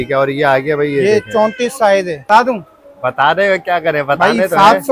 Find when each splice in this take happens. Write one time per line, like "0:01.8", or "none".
0:02.2